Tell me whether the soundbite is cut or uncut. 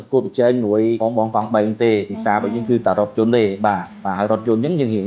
cut